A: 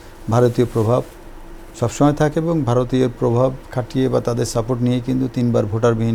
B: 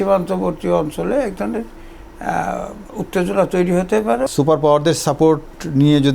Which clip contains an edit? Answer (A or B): B